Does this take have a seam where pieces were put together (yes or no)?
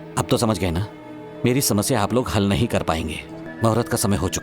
yes